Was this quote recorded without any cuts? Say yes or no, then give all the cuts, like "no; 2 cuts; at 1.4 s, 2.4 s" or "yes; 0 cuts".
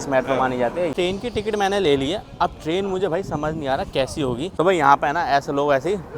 no; 2 cuts; at 0.9 s, 4.5 s